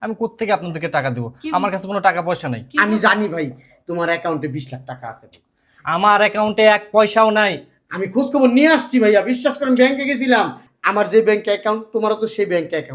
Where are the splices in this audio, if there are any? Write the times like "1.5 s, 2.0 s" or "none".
none